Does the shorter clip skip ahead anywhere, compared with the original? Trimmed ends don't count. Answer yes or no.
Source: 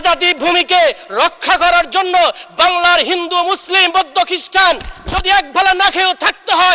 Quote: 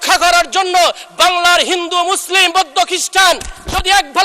no